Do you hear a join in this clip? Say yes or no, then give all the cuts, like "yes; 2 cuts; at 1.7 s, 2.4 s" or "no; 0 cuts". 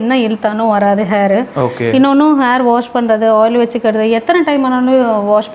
no; 0 cuts